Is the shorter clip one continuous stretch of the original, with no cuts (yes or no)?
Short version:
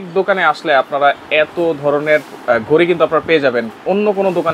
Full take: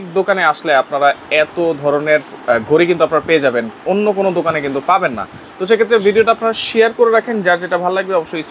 yes